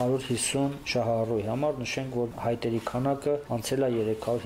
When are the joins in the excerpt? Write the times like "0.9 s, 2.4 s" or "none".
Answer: 0.8 s, 2.3 s, 3.5 s